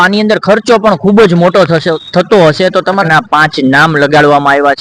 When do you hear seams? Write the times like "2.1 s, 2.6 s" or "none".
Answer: 3.0 s